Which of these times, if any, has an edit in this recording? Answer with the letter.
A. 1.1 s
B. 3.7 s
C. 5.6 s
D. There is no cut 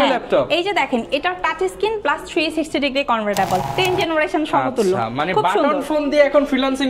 B